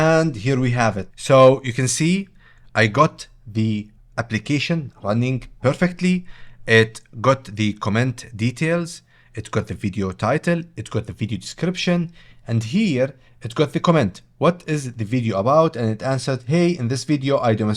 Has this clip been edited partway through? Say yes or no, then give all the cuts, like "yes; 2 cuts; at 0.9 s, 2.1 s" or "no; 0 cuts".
no; 0 cuts